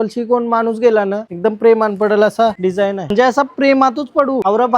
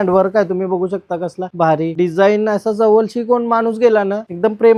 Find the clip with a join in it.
first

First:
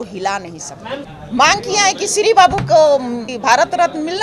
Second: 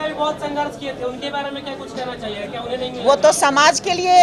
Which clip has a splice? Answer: first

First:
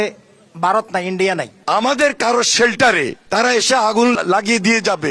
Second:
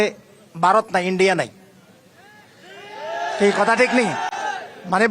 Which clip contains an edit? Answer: first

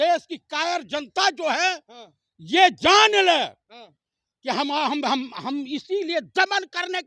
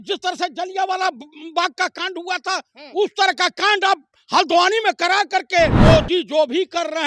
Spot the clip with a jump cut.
second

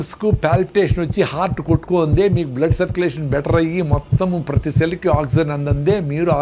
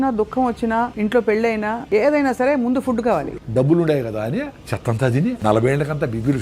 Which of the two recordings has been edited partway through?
second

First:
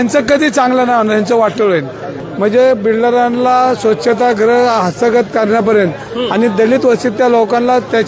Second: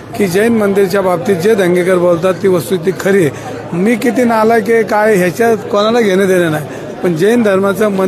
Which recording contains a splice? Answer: first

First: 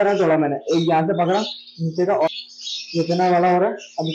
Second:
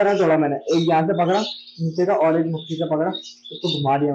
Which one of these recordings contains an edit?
first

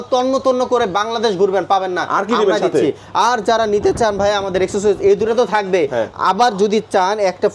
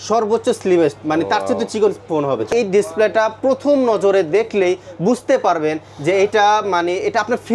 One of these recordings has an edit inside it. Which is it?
second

